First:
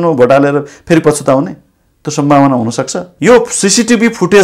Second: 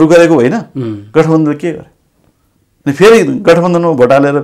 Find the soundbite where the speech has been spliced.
first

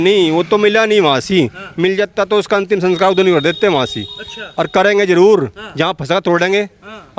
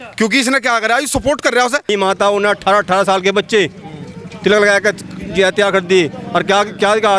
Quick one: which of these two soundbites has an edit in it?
second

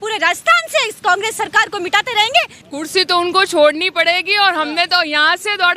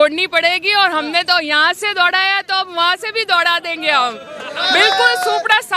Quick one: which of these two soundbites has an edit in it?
first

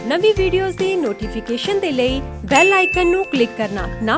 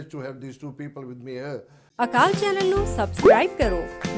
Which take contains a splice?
second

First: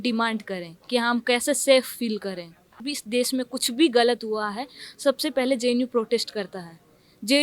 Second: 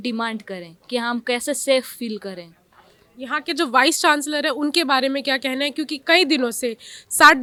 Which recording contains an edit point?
first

